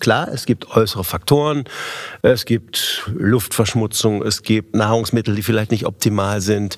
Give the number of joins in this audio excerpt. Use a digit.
1